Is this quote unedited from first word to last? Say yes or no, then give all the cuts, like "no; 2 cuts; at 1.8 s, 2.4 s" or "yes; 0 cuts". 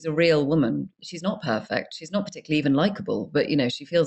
yes; 0 cuts